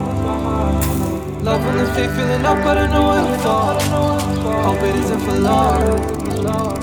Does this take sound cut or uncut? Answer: uncut